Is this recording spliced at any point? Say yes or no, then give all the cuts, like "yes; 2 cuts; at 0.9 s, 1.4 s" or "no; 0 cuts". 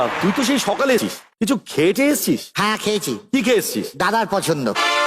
yes; 1 cut; at 1.1 s